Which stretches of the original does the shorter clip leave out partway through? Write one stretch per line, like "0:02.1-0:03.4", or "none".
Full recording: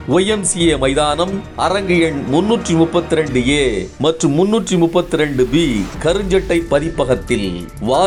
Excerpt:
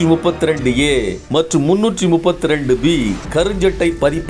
none